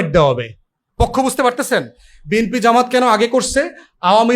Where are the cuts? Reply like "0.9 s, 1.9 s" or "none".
none